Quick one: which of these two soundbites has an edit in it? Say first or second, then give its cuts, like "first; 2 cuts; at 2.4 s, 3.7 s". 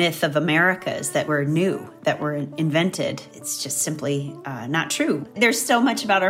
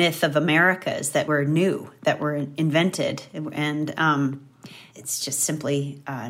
first; 2 cuts; at 3.3 s, 5.3 s